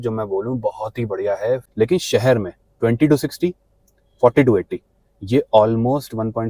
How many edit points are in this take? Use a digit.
1